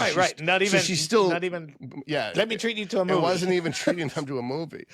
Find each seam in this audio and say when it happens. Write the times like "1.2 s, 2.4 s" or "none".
none